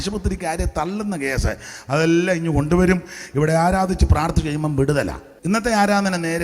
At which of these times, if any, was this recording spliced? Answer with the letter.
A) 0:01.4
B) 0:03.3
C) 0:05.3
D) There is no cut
C